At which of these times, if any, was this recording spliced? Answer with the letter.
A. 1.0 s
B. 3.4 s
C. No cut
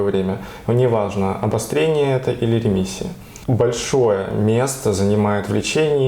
B